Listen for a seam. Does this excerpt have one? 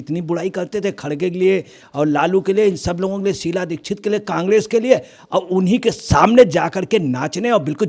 no; 0 cuts

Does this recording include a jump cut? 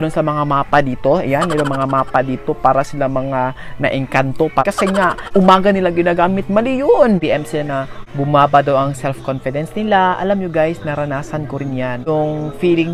yes; 2 cuts; at 4.6 s, 7.2 s

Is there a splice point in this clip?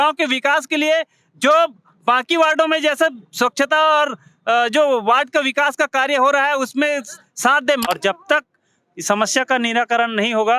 yes; 1 cut; at 7.8 s

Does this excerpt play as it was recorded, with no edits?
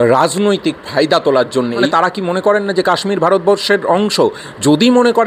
no; 1 cut; at 1.9 s

